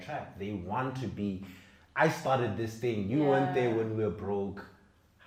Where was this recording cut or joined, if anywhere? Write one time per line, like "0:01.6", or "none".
none